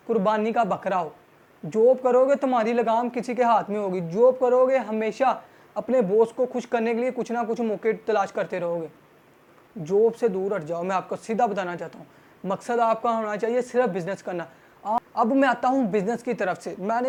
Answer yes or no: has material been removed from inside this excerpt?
no